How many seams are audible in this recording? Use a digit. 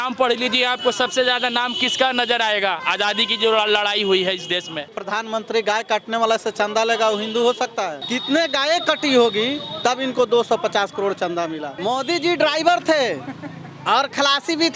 3